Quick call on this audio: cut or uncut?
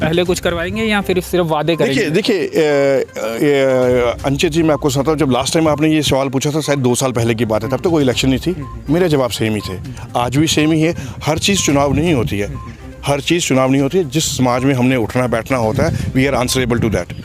uncut